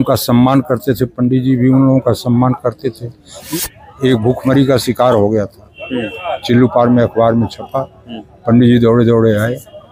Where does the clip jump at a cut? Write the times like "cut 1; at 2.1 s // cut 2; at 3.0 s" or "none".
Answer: cut 1; at 3.4 s